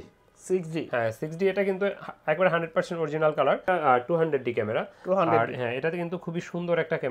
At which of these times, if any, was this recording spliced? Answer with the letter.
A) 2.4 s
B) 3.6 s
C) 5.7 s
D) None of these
B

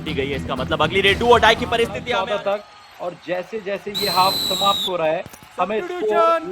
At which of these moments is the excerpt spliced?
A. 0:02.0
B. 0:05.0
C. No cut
A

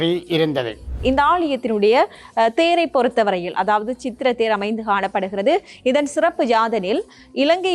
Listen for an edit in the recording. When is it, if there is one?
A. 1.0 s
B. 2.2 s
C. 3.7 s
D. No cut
A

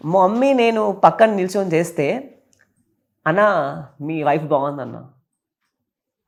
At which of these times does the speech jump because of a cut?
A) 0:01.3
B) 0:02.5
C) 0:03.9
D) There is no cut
D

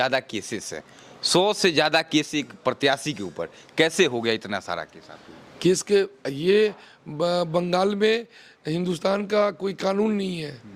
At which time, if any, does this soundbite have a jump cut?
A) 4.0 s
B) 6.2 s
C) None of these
C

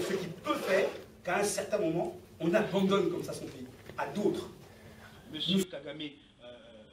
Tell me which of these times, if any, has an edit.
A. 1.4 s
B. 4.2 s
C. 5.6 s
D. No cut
C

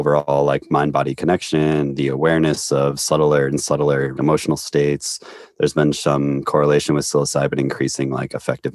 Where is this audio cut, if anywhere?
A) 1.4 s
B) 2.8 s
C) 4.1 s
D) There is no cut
C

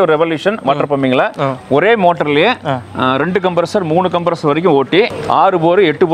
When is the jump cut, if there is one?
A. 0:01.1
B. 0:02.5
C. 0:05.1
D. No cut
C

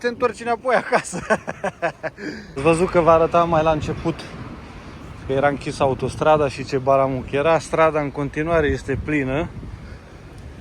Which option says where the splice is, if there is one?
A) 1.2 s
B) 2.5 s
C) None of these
B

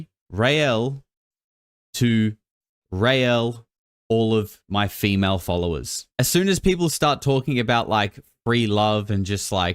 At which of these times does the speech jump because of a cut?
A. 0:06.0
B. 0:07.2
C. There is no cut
A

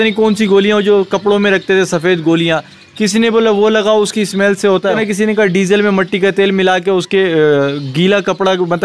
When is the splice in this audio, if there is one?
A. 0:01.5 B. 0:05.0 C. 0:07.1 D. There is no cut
B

